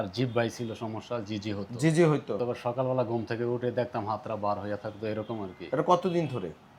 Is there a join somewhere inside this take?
yes; 1 cut; at 2.4 s

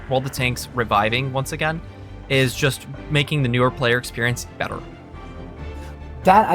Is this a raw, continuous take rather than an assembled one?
yes; 0 cuts

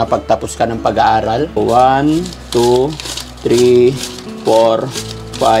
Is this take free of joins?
no; 1 cut; at 1.6 s

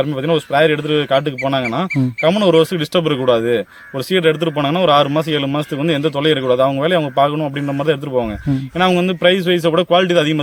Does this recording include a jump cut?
no; 0 cuts

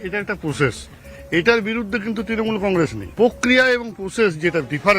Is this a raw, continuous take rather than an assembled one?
no; 1 cut; at 3.0 s

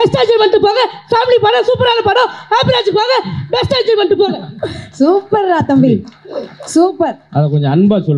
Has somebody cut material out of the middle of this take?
no; 0 cuts

